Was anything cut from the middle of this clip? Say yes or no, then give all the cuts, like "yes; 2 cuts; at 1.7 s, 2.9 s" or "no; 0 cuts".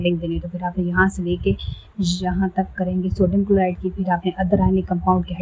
no; 0 cuts